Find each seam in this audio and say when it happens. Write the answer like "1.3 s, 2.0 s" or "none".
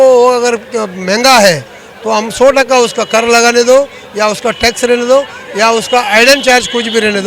none